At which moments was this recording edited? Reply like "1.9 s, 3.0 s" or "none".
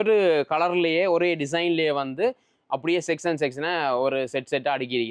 none